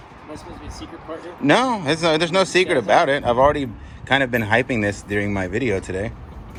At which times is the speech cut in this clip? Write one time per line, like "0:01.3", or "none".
none